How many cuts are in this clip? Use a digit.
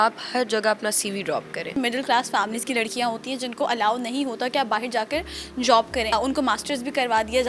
2